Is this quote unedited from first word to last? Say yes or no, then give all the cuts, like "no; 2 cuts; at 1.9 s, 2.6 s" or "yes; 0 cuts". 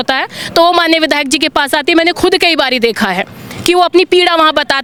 yes; 0 cuts